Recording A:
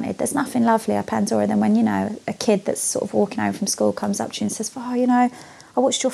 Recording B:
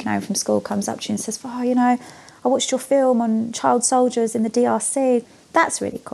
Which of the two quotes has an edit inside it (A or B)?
B